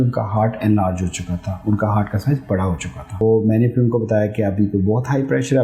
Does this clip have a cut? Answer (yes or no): yes